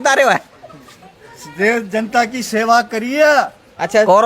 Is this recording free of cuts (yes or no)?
no